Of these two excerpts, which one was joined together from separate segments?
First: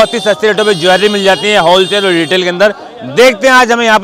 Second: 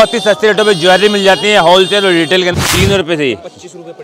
second; 1 cut; at 2.5 s

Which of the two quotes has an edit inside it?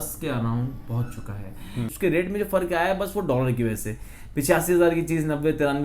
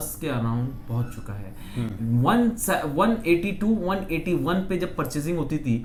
first; 1 cut; at 1.9 s

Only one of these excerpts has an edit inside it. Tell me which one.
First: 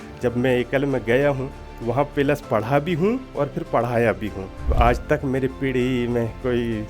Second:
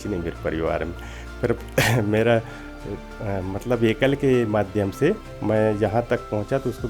first; 1 cut; at 4.7 s

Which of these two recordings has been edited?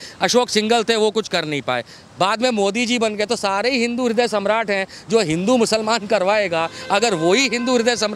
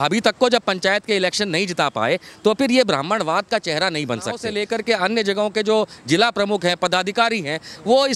second; 1 cut; at 4.5 s

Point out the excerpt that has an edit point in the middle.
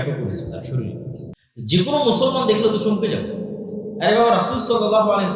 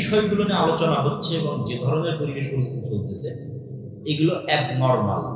first; 1 cut; at 1.4 s

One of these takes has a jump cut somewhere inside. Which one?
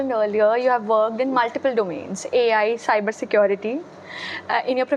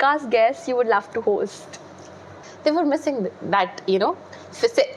second; 1 cut; at 2.4 s

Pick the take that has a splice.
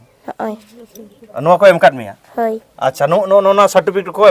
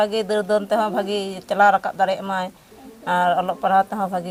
first; 1 cut; at 2.6 s

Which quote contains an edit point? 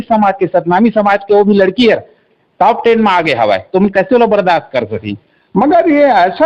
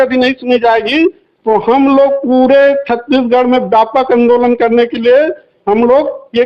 first; 1 cut; at 5.3 s

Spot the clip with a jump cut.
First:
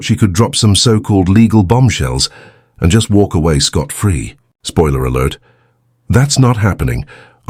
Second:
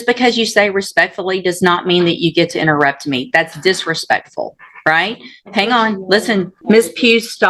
second; 1 cut; at 6.5 s

